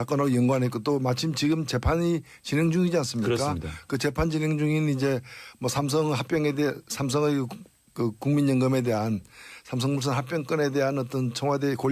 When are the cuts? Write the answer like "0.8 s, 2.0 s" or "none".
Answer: 3.6 s